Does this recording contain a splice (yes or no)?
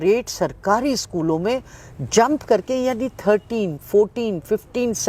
no